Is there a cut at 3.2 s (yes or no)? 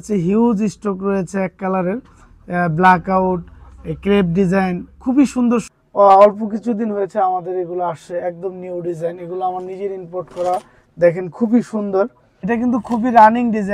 no